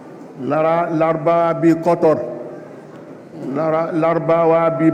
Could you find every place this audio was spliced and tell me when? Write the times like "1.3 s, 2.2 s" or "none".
none